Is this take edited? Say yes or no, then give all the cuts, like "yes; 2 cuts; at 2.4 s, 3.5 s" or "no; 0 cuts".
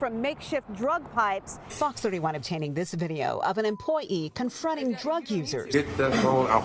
yes; 2 cuts; at 1.7 s, 5.7 s